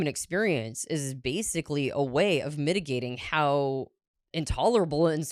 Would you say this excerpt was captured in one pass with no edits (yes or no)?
yes